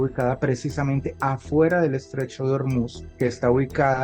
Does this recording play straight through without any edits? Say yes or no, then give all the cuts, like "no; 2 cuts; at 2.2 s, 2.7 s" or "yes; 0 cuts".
no; 1 cut; at 3.0 s